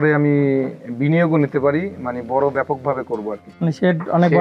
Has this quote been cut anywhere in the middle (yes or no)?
yes